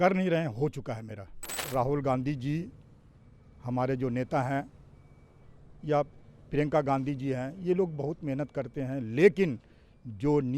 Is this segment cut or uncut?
cut